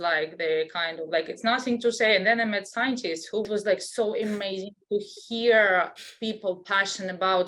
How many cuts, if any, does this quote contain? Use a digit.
1